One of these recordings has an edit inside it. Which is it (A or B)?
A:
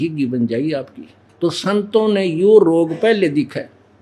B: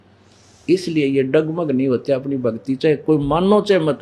A